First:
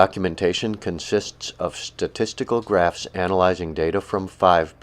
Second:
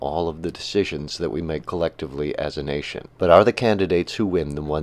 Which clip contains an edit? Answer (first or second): first